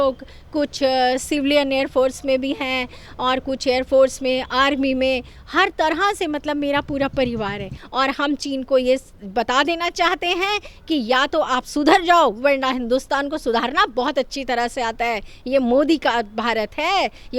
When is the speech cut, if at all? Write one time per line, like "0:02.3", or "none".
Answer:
0:07.8

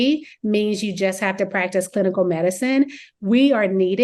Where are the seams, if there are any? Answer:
none

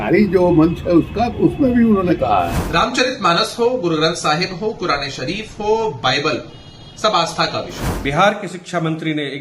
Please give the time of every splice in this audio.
0:02.6
0:07.8

